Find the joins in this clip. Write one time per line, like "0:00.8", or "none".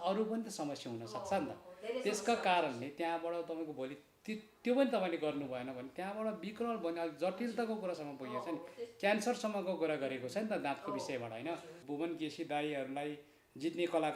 0:11.8